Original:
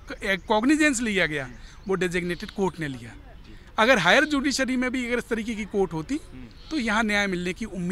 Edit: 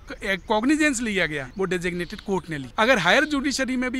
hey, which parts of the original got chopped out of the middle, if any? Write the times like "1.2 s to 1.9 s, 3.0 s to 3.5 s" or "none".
1.4 s to 1.7 s, 3.0 s to 3.7 s